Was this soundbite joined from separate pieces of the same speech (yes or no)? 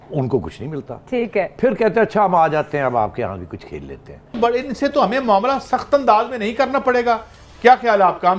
yes